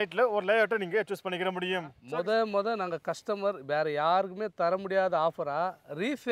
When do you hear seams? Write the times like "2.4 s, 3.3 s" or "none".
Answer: 1.9 s